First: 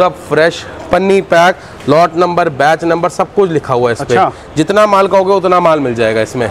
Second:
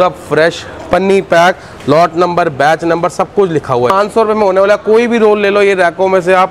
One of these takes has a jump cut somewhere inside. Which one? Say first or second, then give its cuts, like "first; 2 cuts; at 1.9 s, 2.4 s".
second; 1 cut; at 3.9 s